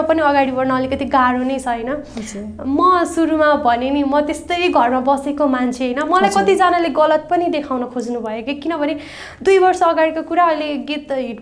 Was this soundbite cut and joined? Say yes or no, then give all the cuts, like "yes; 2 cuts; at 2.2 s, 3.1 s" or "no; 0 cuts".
no; 0 cuts